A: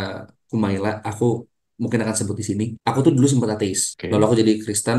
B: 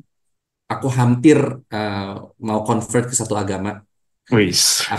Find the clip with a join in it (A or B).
A